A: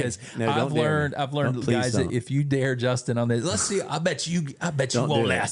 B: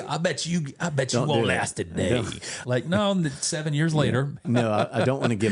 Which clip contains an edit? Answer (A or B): B